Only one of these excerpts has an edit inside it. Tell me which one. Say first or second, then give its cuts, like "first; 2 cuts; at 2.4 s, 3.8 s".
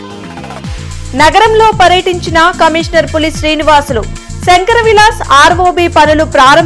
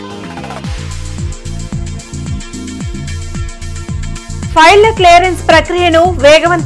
second; 1 cut; at 1.0 s